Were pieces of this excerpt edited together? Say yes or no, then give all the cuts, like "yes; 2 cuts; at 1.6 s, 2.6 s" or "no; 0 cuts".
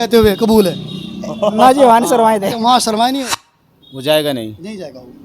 yes; 1 cut; at 3.2 s